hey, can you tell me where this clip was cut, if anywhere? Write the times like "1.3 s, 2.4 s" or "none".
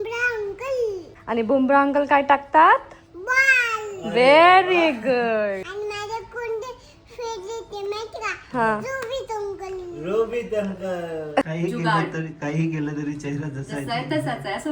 1.1 s, 5.7 s, 11.4 s